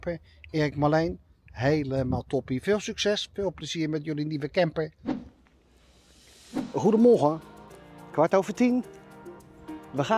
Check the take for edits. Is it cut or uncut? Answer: uncut